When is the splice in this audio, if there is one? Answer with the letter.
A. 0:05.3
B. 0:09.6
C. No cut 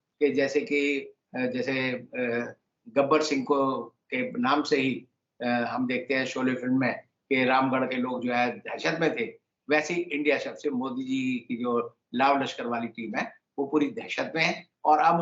C